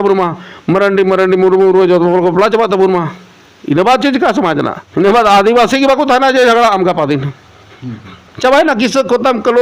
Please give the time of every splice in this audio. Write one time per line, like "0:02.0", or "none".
0:04.8